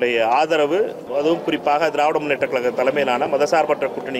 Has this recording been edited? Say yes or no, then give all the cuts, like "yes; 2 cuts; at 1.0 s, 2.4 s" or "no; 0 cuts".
yes; 1 cut; at 1.0 s